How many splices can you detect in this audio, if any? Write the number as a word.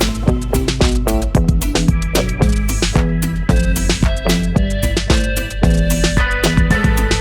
one